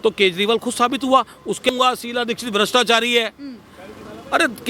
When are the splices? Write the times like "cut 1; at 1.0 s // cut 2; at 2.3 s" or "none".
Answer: cut 1; at 1.7 s